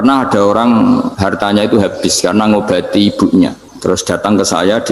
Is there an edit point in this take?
yes; 2 cuts; at 1.1 s, 3.7 s

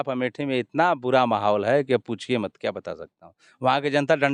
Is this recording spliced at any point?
no; 0 cuts

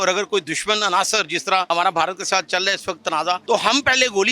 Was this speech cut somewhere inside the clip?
yes; 2 cuts; at 1.7 s, 3.4 s

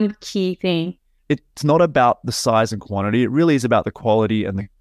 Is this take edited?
yes; 1 cut; at 1.1 s

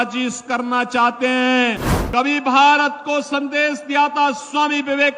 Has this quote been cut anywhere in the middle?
yes; 1 cut; at 1.9 s

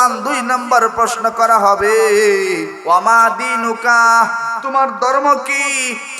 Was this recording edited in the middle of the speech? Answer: yes; 1 cut; at 2.7 s

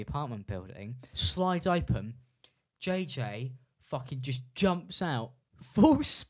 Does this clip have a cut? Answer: yes; 1 cut; at 1.1 s

